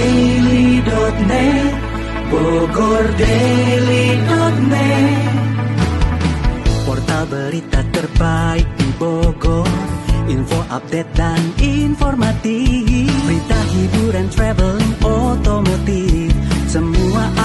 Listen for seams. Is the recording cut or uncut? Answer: uncut